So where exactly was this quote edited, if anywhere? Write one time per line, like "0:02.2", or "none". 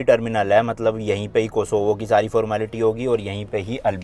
none